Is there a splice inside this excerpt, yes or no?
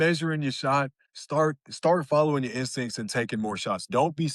no